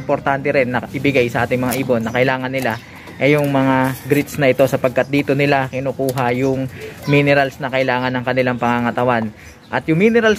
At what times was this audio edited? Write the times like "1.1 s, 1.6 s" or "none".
none